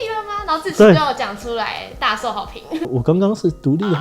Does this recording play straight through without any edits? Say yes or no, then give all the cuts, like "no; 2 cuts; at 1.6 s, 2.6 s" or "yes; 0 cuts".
no; 1 cut; at 2.9 s